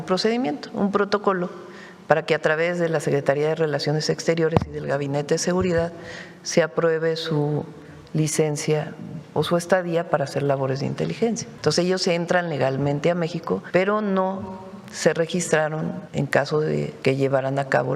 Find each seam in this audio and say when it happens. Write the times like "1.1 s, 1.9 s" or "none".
11.5 s, 13.6 s, 16.0 s, 16.9 s